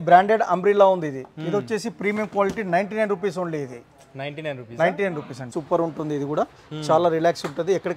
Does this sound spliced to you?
yes; 1 cut; at 5.4 s

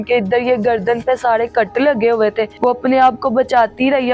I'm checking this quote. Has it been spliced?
yes; 1 cut; at 2.5 s

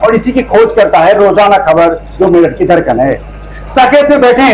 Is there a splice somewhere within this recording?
no; 0 cuts

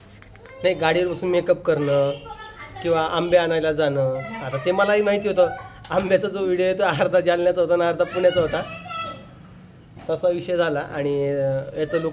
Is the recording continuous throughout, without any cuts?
yes; 0 cuts

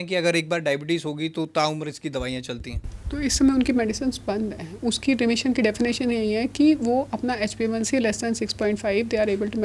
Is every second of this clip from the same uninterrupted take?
yes; 0 cuts

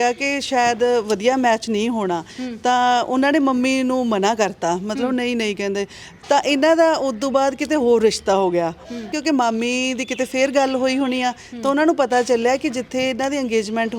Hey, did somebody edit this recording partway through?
yes; 1 cut; at 9.1 s

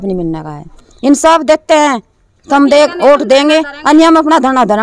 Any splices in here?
no; 0 cuts

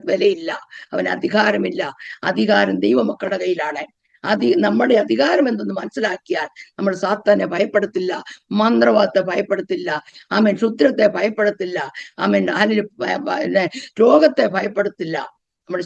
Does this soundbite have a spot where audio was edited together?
no; 0 cuts

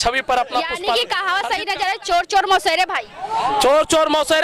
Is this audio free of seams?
no; 1 cut; at 1.0 s

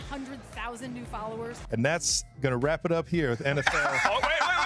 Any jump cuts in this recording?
yes; 1 cut; at 1.6 s

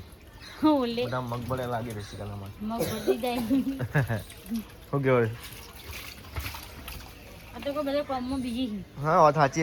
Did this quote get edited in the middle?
no; 0 cuts

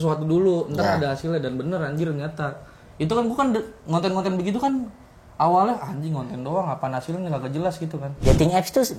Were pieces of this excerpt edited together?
yes; 1 cut; at 8.1 s

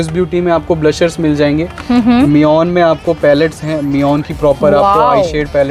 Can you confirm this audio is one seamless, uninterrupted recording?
yes; 0 cuts

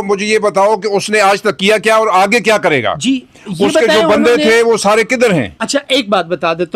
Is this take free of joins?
yes; 0 cuts

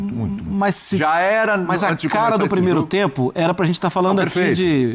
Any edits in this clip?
no; 0 cuts

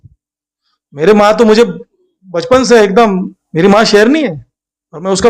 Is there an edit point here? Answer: yes; 1 cut; at 3.4 s

